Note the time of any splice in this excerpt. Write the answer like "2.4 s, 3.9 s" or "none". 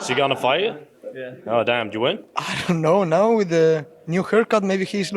2.3 s